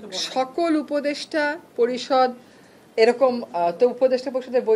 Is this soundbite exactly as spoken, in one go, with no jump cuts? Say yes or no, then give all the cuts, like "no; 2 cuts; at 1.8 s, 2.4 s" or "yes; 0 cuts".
yes; 0 cuts